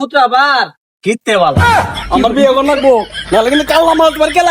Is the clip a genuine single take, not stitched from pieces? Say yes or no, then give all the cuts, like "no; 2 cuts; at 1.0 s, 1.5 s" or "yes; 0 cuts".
no; 1 cut; at 1.9 s